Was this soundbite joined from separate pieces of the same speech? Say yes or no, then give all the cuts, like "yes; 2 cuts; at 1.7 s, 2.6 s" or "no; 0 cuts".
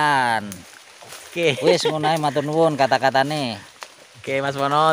no; 0 cuts